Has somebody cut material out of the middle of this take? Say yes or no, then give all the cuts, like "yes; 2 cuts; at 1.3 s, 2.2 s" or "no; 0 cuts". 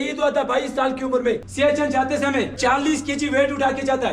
yes; 2 cuts; at 1.5 s, 2.5 s